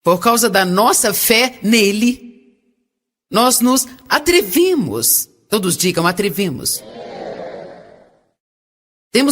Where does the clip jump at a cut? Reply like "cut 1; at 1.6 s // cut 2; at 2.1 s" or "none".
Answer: cut 1; at 3.4 s